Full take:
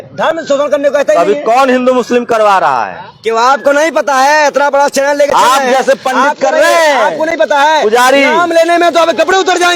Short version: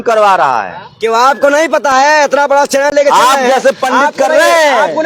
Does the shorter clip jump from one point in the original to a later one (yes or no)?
no